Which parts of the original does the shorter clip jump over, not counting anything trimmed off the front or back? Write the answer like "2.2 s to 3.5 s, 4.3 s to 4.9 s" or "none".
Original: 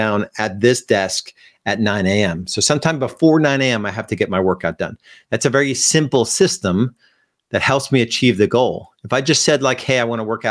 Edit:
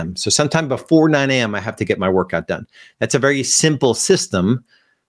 none